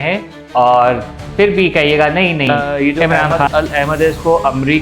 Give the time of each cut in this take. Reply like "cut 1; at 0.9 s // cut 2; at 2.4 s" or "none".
cut 1; at 2.5 s